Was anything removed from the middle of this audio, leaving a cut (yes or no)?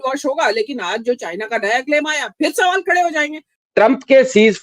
yes